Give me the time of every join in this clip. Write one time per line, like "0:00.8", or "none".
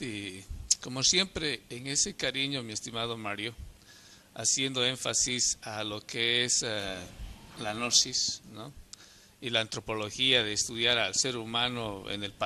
none